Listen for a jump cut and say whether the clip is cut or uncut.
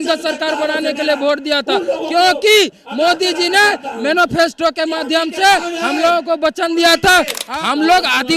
cut